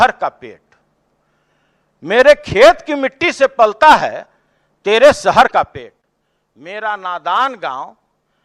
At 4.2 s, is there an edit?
no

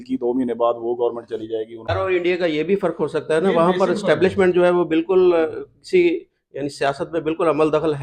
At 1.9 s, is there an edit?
yes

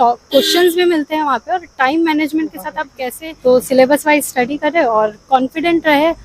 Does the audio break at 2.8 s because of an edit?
yes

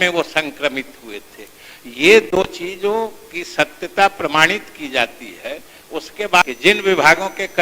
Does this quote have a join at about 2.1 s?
no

